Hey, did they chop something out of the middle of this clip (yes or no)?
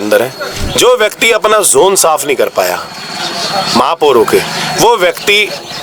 no